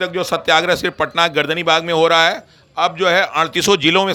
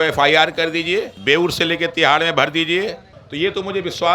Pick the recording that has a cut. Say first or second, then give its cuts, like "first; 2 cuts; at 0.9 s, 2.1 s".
second; 2 cuts; at 1.1 s, 3.1 s